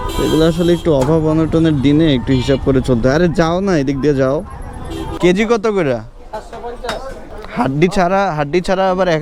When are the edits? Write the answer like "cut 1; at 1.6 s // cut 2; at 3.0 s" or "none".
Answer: cut 1; at 5.0 s // cut 2; at 7.3 s